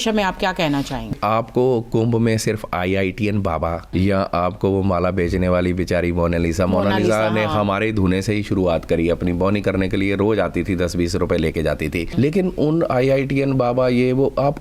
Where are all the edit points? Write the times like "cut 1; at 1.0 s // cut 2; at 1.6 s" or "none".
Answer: cut 1; at 1.1 s // cut 2; at 3.9 s // cut 3; at 12.1 s